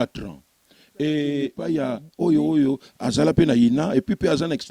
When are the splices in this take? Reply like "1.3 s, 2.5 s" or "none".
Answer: 1.6 s

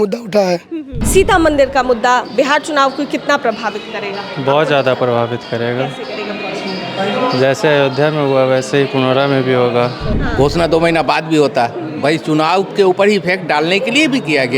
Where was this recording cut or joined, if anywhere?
0.9 s, 10.1 s

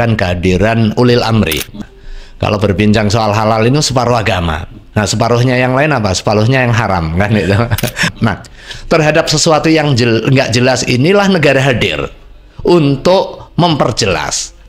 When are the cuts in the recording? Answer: 1.8 s, 8.1 s

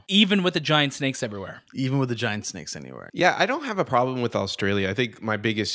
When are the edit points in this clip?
3.0 s

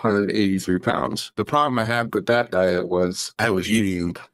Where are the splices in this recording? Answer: 1.2 s, 3.2 s

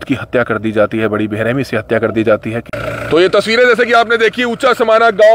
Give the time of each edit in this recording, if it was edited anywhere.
2.7 s

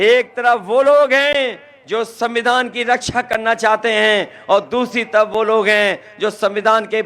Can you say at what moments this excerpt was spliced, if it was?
none

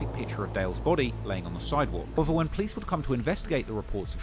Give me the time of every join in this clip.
2.2 s

